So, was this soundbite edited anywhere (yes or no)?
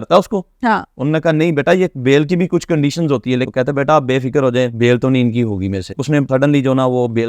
yes